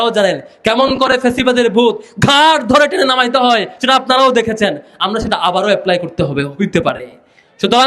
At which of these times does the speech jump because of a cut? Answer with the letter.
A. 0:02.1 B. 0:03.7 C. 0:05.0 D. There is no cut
D